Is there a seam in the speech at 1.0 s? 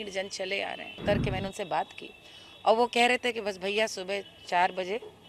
yes; 1 cut; at 1.0 s

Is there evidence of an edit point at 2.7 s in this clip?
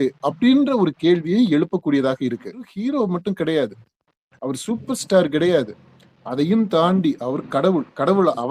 yes; 1 cut; at 2.7 s

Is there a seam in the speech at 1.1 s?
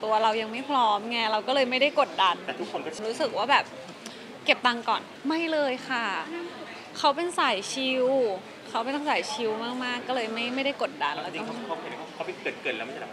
no; 2 cuts; at 2.9 s, 5.1 s

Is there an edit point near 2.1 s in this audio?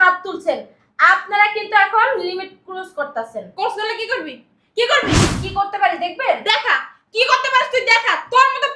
no; 1 cut; at 5.2 s

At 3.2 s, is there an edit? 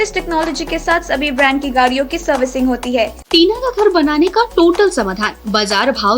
yes; 1 cut; at 3.2 s

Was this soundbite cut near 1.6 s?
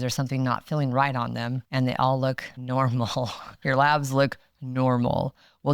yes; 1 cut; at 1.6 s

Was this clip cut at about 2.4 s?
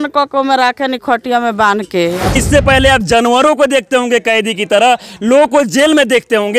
yes; 1 cut; at 2.4 s

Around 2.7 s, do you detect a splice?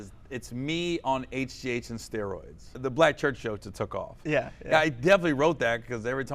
yes; 1 cut; at 2.7 s

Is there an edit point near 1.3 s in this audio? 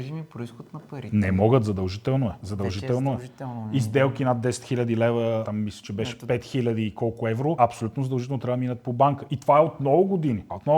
no; 0 cuts

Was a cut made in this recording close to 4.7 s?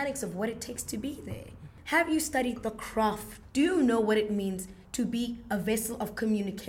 no; 2 cuts; at 1.7 s, 3.3 s

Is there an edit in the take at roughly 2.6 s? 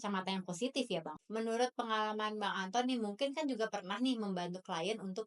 no; 1 cut; at 1.2 s

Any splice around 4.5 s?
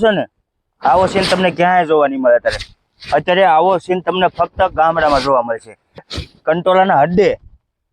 no; 1 cut; at 6.1 s

